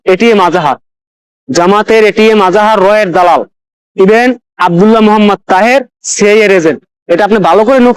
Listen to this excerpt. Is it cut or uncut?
uncut